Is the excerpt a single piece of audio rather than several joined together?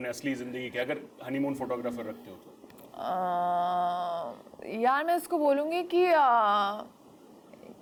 yes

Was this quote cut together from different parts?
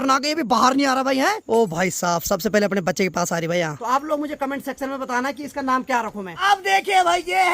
yes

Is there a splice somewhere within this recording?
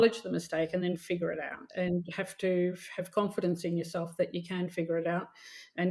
yes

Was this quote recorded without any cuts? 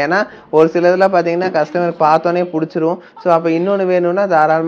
yes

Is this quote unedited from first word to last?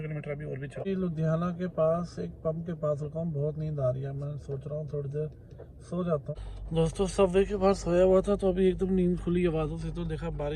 no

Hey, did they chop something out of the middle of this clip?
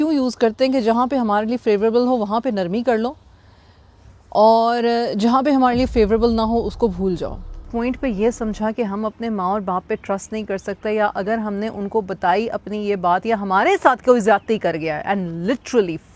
yes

